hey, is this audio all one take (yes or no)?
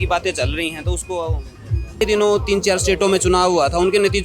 no